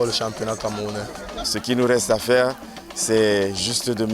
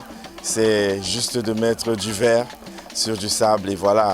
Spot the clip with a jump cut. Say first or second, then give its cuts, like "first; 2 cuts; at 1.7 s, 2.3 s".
first; 1 cut; at 1.5 s